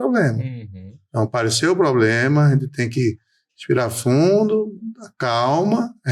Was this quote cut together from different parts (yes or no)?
no